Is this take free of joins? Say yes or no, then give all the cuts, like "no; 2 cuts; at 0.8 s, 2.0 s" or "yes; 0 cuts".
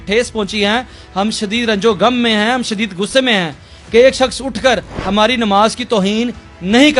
yes; 0 cuts